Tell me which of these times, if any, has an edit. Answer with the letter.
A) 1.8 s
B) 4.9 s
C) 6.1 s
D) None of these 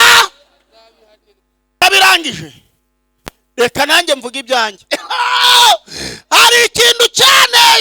A